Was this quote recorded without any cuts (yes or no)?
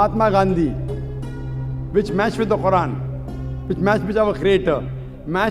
yes